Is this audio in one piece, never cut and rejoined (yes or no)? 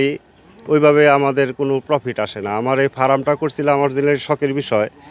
yes